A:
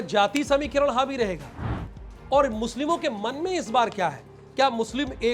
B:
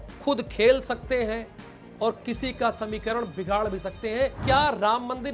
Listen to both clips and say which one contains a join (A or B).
B